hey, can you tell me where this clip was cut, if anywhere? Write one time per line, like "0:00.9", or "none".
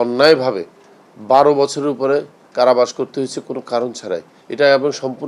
none

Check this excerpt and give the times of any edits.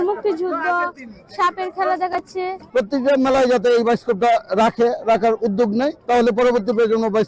0:02.6
0:06.0

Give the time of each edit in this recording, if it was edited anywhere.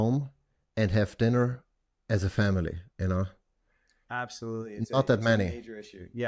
none

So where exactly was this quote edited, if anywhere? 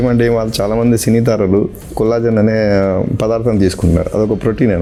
none

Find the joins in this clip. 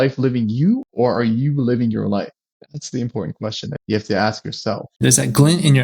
0:00.9
0:02.4
0:03.8
0:05.0

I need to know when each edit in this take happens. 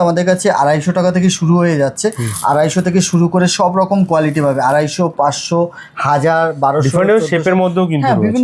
none

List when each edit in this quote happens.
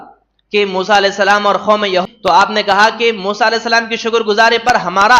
0:02.0

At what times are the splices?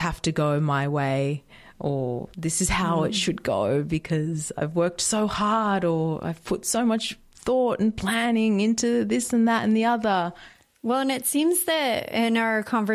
0:02.3

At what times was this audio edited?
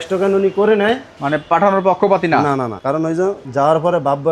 0:01.1
0:03.0

